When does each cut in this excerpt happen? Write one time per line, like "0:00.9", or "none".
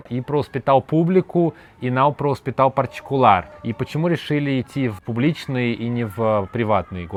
none